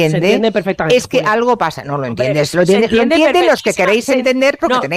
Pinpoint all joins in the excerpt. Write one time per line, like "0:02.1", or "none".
none